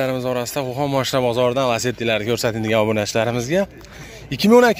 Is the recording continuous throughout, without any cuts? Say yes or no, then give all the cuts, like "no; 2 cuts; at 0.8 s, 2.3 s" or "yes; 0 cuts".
yes; 0 cuts